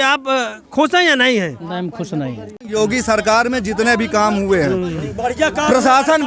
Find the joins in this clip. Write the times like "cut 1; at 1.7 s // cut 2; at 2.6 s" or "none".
cut 1; at 2.6 s